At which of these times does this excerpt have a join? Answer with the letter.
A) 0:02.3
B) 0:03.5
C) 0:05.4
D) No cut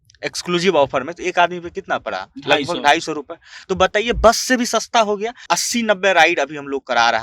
C